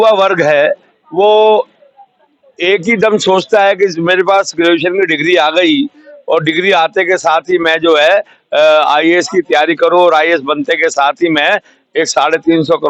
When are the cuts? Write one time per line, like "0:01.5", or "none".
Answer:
none